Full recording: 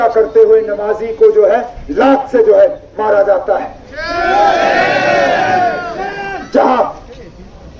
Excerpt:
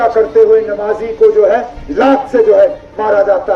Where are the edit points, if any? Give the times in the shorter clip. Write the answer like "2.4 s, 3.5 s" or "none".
none

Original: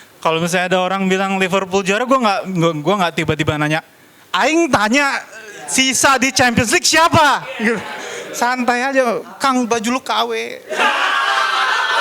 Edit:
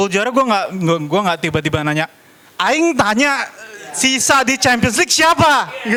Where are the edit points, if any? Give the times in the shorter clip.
none

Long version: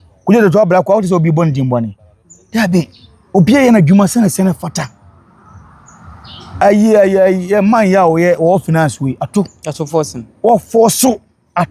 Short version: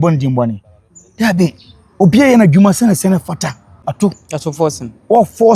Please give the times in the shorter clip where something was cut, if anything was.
3.8 s

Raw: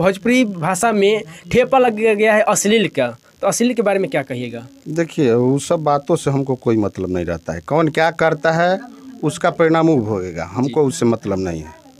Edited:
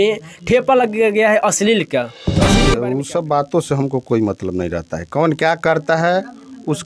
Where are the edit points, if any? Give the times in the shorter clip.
2.7 s

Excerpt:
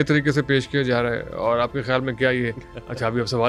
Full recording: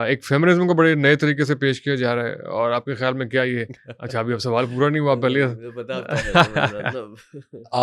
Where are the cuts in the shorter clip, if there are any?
none

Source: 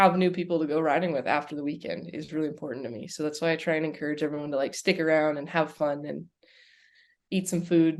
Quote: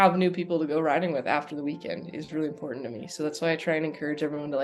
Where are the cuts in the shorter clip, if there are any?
none

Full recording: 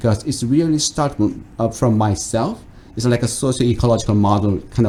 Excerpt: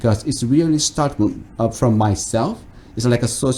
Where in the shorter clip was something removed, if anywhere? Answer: none

